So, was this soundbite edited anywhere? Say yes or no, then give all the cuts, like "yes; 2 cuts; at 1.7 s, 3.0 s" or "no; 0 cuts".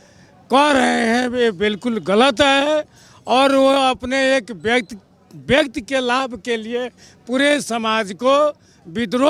no; 0 cuts